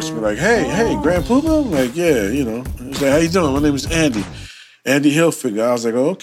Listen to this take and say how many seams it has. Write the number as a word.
zero